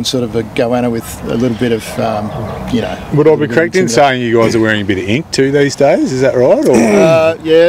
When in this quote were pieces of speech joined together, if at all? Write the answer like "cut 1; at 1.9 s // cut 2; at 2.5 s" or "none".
none

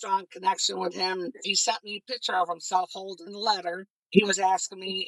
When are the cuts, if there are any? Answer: cut 1; at 1.5 s // cut 2; at 3.9 s

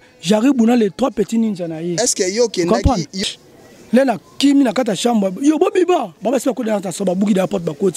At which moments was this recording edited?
cut 1; at 3.2 s

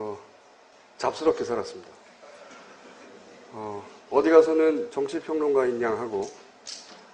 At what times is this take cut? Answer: cut 1; at 2.8 s

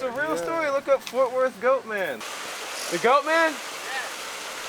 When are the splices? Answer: cut 1; at 2.2 s

